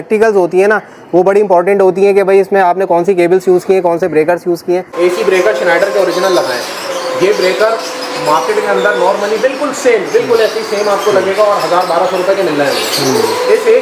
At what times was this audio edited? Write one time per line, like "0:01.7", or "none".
0:04.9

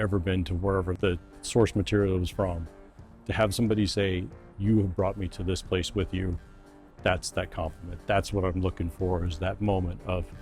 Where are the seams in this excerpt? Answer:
0:01.0

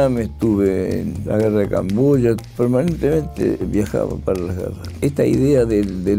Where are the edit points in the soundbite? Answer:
0:01.1
0:02.4
0:04.8

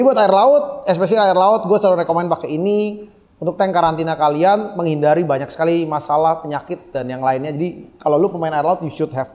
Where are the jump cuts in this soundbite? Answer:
none

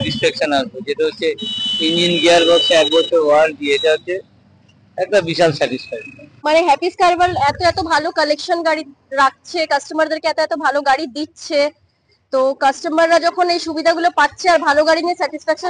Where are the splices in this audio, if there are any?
0:06.3

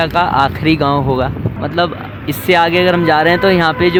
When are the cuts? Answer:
none

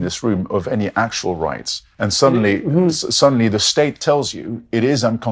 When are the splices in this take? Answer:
0:01.9

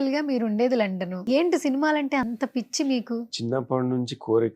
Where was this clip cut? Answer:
0:01.2

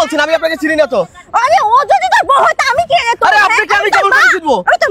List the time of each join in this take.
none

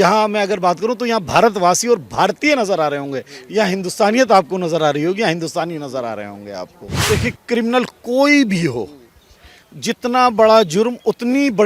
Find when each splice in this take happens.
0:06.9

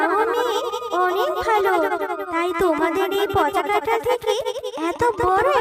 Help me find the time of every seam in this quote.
none

